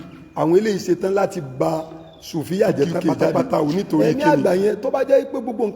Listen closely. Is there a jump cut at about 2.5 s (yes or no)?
no